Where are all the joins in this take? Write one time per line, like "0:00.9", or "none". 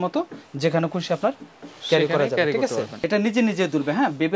0:02.9